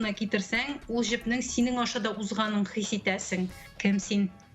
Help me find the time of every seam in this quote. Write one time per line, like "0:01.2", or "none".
0:03.6

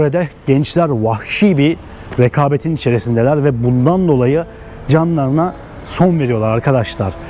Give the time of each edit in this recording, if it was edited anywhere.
none

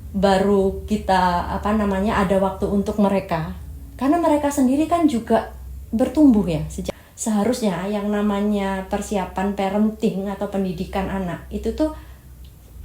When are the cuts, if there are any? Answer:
0:06.9

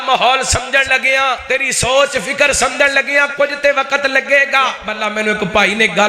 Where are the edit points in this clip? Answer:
0:01.4
0:04.9

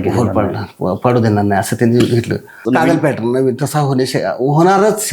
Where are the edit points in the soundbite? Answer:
0:02.6

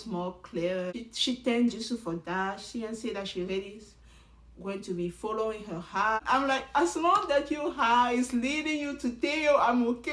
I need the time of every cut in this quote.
0:00.9
0:06.2

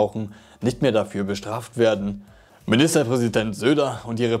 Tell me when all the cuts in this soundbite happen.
none

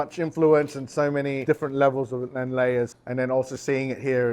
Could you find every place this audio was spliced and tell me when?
0:01.4
0:02.9

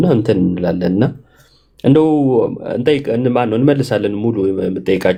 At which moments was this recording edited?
none

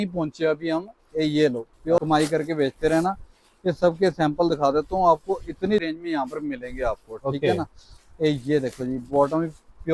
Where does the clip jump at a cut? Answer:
0:02.0
0:05.9

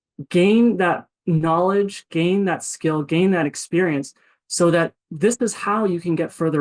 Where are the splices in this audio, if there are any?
none

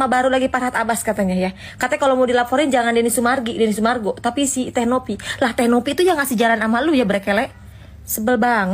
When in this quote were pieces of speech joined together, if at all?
none

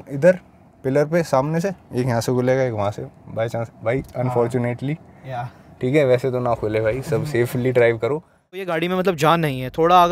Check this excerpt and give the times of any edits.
0:08.8

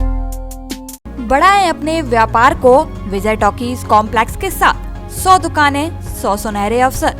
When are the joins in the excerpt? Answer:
none

